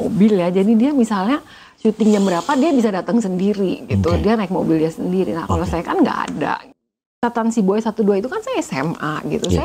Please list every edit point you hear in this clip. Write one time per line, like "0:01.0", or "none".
0:06.7